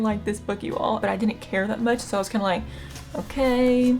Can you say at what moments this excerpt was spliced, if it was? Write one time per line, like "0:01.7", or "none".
0:01.0

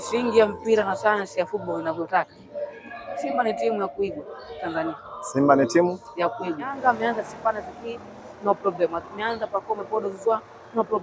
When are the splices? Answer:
0:06.8

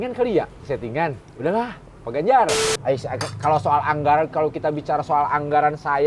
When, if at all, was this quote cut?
0:02.7

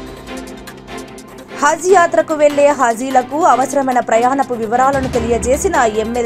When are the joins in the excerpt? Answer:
0:01.0

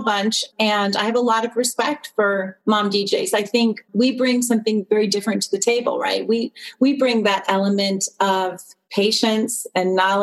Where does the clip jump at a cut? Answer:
none

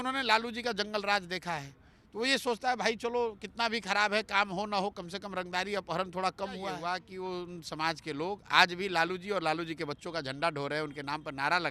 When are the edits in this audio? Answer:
0:07.0

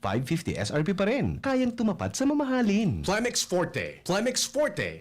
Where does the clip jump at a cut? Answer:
0:03.0

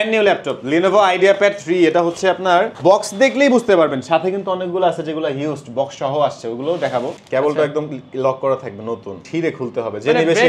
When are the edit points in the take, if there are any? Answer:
0:02.7
0:07.2
0:09.2

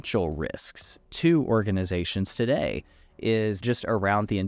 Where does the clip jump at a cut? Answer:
0:03.6

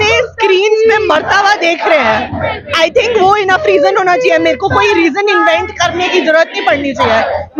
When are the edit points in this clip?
none

